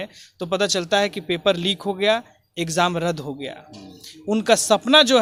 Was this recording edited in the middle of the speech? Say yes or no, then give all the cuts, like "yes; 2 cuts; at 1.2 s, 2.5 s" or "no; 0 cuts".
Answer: no; 0 cuts